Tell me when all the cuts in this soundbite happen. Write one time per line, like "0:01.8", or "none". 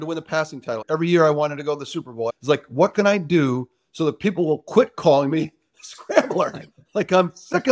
0:00.8
0:02.3